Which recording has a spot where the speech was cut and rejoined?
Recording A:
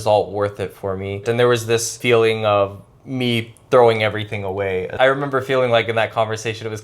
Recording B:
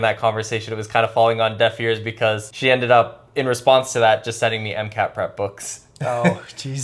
A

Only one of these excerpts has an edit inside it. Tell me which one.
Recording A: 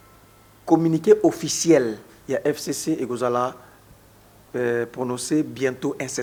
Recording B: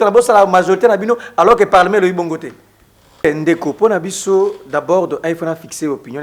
B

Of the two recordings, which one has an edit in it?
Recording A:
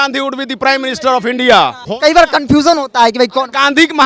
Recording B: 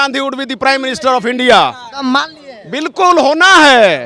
A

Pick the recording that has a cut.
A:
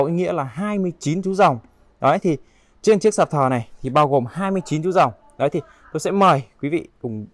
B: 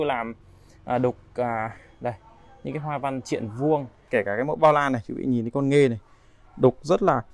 B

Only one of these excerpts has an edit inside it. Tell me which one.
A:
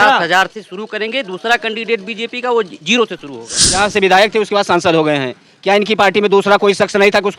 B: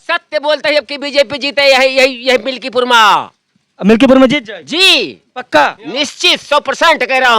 A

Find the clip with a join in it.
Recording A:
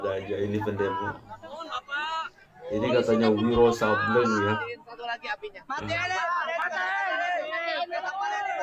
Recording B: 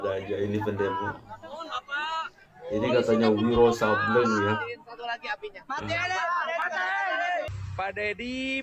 B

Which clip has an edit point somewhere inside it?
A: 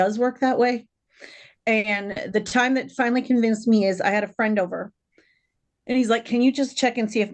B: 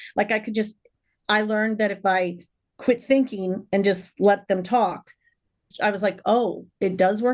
B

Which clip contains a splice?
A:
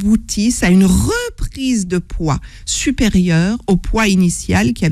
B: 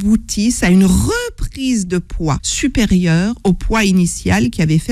B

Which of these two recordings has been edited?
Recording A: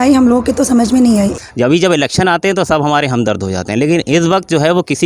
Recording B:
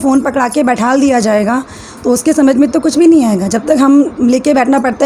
A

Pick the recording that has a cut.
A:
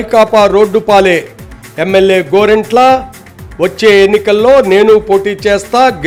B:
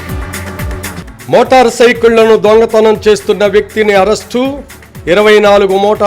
B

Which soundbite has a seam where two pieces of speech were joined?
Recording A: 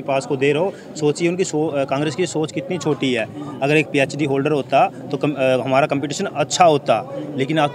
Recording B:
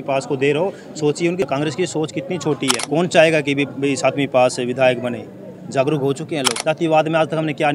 B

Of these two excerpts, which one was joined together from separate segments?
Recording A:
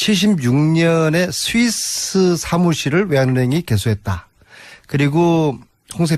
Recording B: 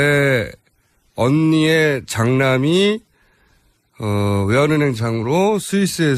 B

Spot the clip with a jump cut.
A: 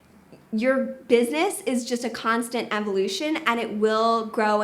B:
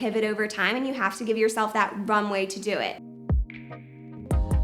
B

